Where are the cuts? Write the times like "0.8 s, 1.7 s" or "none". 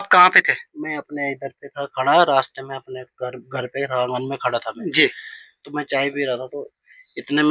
none